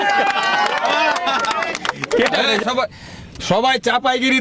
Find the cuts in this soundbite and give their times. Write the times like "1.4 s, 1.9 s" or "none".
2.5 s

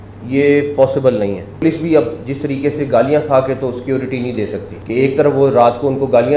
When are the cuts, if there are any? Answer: 1.6 s, 4.7 s

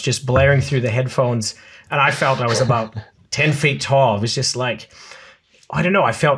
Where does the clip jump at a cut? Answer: none

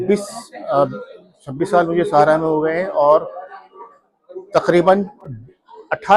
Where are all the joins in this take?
none

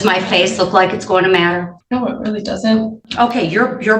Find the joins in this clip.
1.8 s, 3.0 s

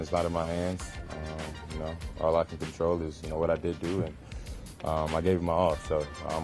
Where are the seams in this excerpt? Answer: none

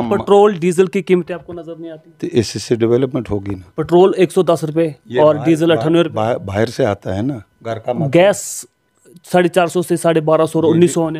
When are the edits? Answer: none

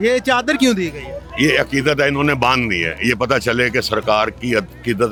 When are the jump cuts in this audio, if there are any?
none

